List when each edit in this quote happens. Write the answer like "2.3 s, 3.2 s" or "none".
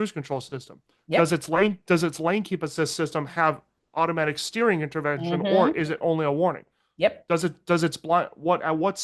none